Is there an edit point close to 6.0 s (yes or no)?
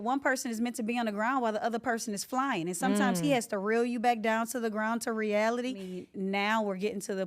yes